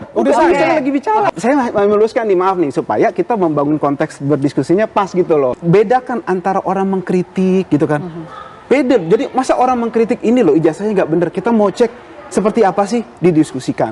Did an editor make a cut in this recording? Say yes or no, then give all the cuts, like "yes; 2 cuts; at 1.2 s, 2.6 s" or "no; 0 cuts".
yes; 2 cuts; at 1.3 s, 5.6 s